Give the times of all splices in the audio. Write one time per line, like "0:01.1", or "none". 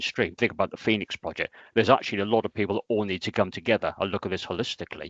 none